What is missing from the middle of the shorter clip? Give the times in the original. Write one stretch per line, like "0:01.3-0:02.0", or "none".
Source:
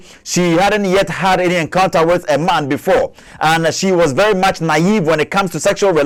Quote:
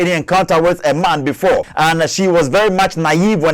0:03.1-0:03.3